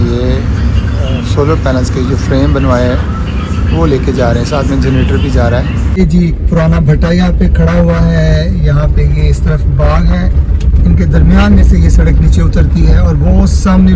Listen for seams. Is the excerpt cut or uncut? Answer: cut